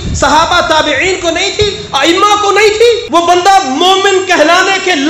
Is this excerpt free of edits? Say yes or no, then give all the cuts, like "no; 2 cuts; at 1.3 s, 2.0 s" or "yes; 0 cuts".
no; 1 cut; at 3.0 s